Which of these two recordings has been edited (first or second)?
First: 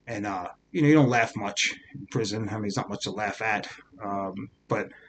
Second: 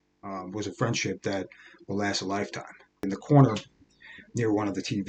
second